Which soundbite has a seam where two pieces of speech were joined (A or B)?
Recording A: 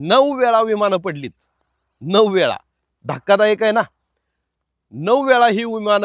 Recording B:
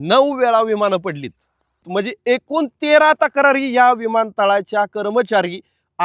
B